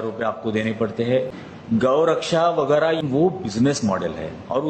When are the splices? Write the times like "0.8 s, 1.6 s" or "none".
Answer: 1.4 s, 3.0 s